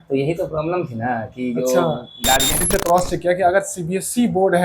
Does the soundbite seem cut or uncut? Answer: cut